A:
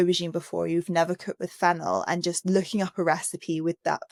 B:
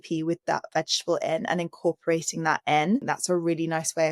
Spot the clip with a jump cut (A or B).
B